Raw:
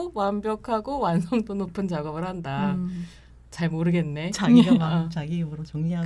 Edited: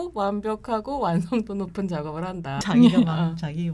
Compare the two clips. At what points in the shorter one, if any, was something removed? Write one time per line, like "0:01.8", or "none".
0:02.6